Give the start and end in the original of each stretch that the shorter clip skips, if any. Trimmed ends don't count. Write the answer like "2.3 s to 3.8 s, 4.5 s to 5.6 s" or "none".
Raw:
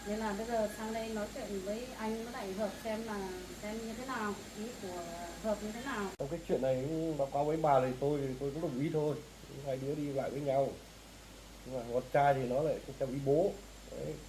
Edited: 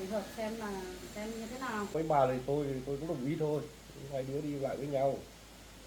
4.4 s to 7.5 s